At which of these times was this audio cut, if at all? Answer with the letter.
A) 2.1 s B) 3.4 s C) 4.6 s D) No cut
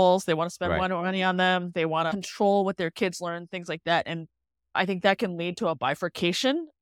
A